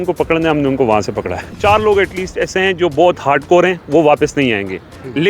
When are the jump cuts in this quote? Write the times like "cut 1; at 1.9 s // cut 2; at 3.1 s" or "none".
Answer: cut 1; at 1.5 s

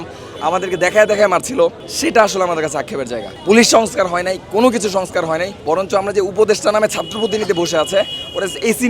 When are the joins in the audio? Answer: cut 1; at 1.9 s // cut 2; at 3.3 s // cut 3; at 5.5 s

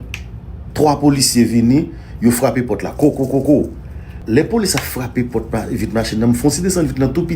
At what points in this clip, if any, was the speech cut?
cut 1; at 4.1 s

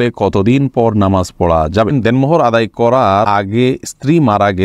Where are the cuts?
cut 1; at 1.9 s // cut 2; at 3.3 s

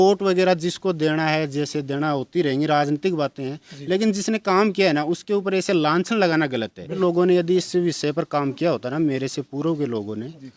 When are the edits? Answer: cut 1; at 7.0 s

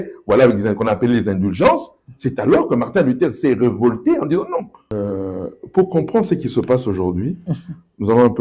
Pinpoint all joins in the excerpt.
cut 1; at 4.8 s

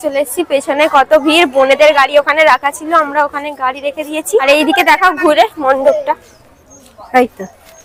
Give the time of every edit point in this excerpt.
none

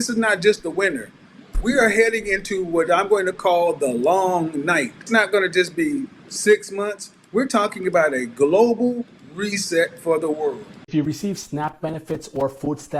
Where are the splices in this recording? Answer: cut 1; at 5.0 s // cut 2; at 10.8 s

